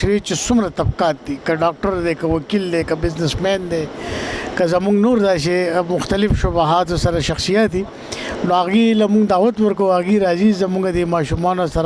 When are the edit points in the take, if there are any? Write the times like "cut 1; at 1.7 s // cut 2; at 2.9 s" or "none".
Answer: none